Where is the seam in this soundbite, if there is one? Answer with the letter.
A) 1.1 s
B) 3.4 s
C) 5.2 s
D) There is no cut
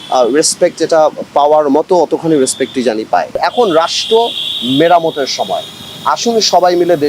B